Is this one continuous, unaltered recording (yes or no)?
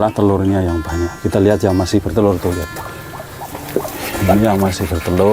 yes